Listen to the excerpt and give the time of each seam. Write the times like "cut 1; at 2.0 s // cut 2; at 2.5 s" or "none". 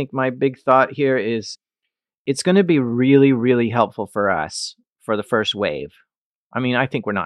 none